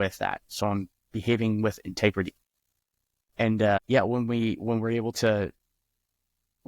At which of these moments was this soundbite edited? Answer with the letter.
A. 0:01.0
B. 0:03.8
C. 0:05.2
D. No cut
B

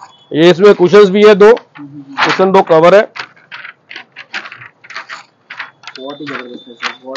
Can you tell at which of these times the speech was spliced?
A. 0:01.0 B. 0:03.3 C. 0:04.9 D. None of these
D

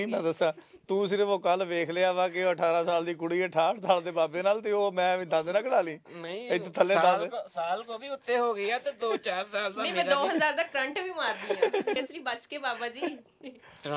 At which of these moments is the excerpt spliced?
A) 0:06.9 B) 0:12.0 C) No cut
B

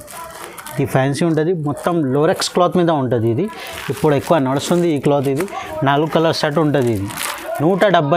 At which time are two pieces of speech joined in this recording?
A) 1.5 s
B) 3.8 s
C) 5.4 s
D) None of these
D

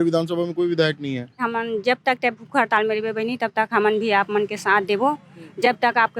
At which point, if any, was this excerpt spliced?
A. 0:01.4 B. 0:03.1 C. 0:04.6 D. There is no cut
A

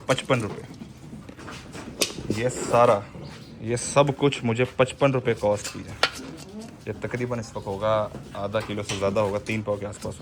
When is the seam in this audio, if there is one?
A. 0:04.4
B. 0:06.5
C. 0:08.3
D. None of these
D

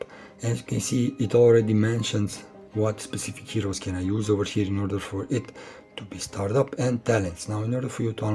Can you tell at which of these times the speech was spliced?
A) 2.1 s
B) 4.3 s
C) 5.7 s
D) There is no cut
D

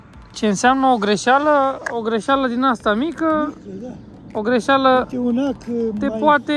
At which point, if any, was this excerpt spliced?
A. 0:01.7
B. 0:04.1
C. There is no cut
C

